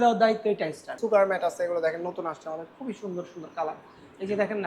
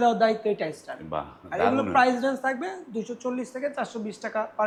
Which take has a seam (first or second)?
first